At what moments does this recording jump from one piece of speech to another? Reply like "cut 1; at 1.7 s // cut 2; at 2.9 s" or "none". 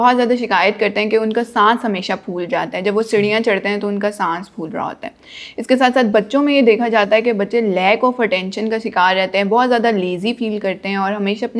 none